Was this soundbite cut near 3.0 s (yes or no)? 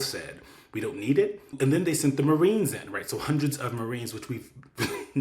no